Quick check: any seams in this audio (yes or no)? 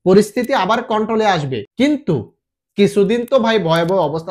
yes